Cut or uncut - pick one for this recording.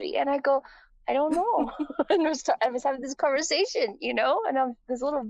uncut